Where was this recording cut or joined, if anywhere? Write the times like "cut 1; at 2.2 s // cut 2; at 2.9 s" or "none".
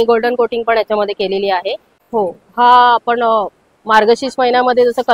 cut 1; at 1.9 s